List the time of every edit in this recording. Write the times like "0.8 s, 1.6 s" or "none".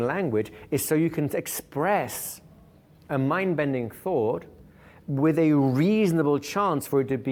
none